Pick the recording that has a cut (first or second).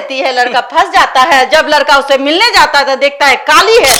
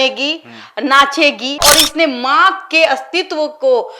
second